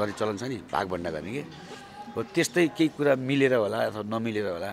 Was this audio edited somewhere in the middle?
no; 0 cuts

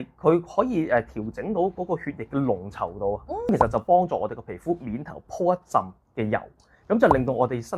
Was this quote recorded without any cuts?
no; 1 cut; at 3.5 s

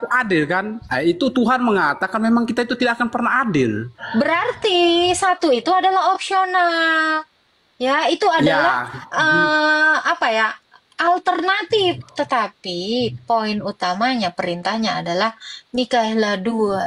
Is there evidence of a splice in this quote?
no; 0 cuts

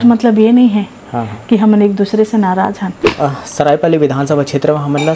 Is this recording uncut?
no; 1 cut; at 2.9 s

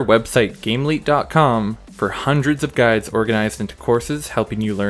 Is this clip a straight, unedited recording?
yes; 0 cuts

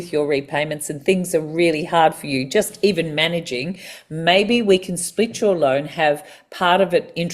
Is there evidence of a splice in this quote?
no; 0 cuts

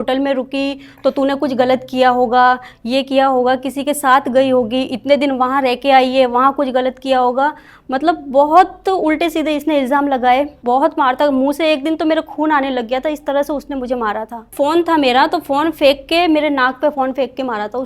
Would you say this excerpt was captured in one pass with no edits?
no; 2 cuts; at 10.6 s, 14.5 s

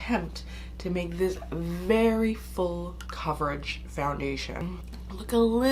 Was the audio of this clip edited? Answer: yes; 2 cuts; at 3.0 s, 4.7 s

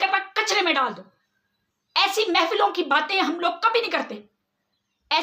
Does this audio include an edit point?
no; 0 cuts

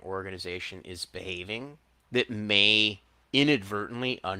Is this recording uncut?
no; 2 cuts; at 1.9 s, 3.1 s

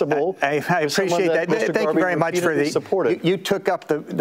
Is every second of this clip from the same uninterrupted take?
yes; 0 cuts

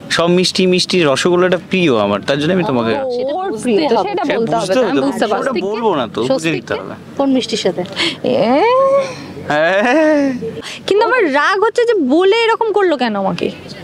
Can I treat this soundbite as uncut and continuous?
no; 1 cut; at 10.6 s

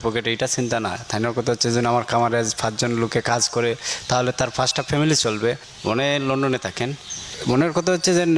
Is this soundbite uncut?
no; 2 cuts; at 5.7 s, 7.4 s

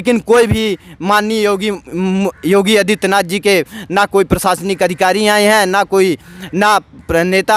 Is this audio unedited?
yes; 0 cuts

